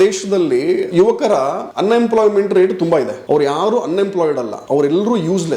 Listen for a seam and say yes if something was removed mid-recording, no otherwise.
yes